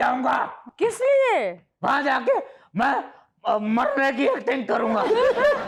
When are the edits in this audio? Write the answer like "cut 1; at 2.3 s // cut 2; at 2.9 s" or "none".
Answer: none